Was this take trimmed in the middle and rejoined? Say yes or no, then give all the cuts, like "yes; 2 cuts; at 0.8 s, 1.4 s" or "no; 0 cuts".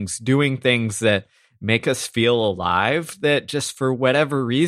no; 0 cuts